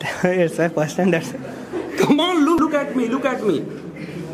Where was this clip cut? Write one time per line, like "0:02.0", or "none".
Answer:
0:02.6